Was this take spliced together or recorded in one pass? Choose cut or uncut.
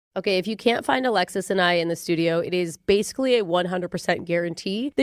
uncut